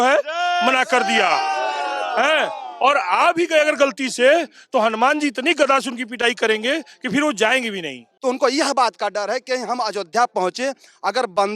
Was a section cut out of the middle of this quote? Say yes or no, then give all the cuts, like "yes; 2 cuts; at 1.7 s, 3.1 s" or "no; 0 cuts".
yes; 1 cut; at 8.0 s